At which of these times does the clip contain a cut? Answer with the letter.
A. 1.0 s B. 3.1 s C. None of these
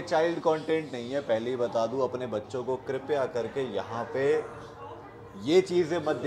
C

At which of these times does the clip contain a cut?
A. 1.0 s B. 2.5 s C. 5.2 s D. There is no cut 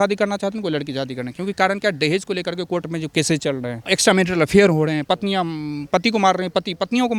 D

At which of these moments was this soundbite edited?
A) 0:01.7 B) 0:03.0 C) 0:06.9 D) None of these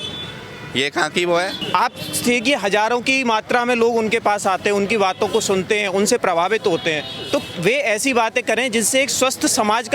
A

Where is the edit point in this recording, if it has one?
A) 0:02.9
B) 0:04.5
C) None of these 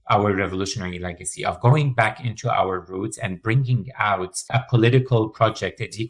B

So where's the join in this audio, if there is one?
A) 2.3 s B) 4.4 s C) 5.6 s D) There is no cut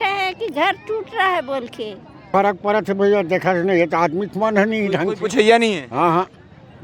A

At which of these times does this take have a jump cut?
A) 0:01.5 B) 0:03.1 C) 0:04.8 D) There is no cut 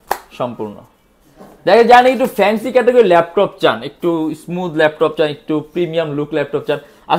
D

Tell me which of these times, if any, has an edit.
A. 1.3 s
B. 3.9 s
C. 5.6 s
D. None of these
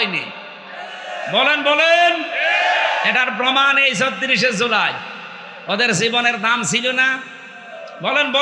D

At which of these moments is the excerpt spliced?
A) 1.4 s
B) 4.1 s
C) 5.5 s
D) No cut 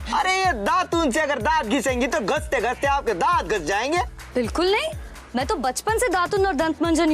B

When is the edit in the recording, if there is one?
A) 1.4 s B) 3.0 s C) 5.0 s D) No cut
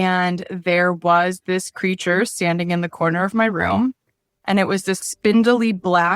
C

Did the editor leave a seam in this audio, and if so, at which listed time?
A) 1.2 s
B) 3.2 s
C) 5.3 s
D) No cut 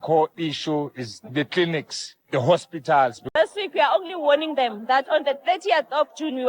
B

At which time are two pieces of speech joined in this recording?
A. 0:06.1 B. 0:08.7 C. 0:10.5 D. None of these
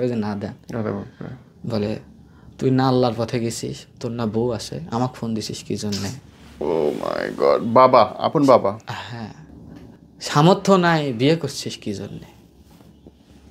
D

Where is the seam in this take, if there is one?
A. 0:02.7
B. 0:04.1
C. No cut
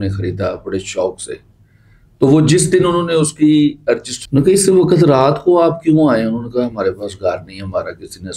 B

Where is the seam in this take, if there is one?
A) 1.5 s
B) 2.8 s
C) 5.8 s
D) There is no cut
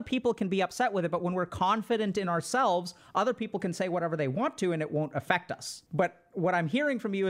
C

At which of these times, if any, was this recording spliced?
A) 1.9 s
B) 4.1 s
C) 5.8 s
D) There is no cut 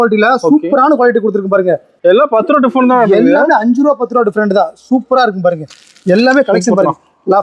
A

